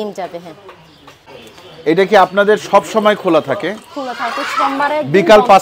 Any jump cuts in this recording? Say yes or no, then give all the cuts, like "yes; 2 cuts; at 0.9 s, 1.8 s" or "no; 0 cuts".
yes; 1 cut; at 1.4 s